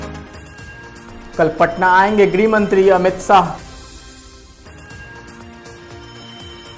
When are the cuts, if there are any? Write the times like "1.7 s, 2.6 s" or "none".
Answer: 0.9 s